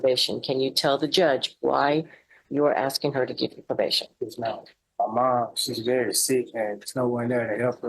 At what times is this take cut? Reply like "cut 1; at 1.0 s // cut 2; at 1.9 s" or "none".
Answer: cut 1; at 4.8 s